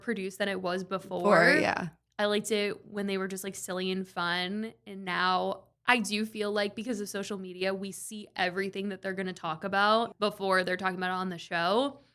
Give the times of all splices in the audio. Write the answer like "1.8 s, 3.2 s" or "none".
10.1 s